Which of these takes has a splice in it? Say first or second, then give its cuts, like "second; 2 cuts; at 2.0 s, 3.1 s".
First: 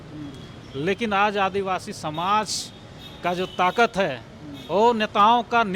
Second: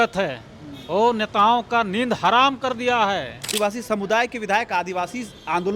second; 1 cut; at 3.5 s